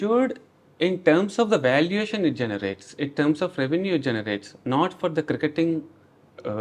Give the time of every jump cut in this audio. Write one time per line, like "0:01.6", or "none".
none